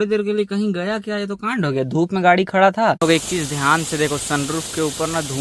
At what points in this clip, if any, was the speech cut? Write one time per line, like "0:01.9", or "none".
0:03.0